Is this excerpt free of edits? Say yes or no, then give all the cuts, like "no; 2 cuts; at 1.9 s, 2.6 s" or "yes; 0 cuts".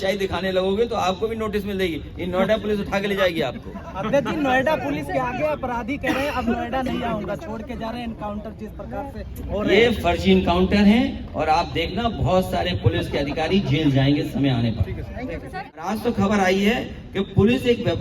no; 1 cut; at 15.4 s